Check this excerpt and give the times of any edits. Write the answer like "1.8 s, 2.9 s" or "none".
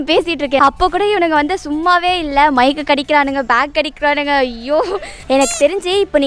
5.2 s